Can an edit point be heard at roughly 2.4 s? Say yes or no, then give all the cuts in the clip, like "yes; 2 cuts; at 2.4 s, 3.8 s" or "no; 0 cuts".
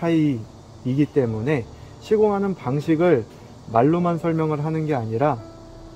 no; 0 cuts